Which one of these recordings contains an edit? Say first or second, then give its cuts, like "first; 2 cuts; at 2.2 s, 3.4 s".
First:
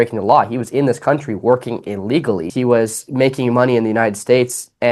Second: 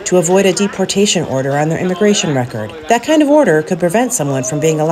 first; 1 cut; at 2.5 s